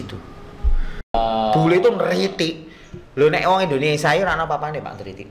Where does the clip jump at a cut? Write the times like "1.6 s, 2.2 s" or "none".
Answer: 1.0 s